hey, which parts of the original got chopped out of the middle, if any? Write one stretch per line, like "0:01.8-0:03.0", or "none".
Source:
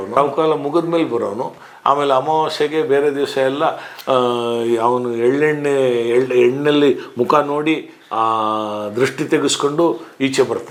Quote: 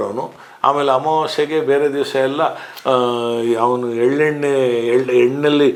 none